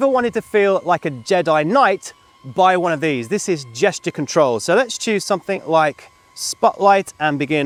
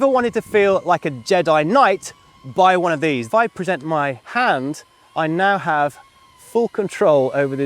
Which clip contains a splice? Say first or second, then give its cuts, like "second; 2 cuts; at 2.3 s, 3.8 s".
second; 2 cuts; at 3.3 s, 4.2 s